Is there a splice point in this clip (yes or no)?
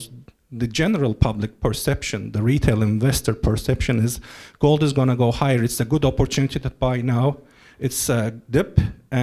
no